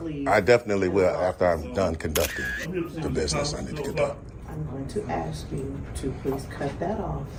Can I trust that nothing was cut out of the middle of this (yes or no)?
yes